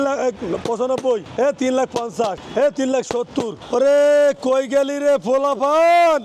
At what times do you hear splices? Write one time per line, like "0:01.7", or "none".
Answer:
0:03.6